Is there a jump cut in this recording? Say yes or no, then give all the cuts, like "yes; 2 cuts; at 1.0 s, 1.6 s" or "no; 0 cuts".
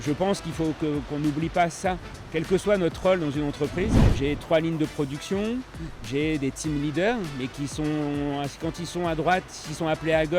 yes; 1 cut; at 4.1 s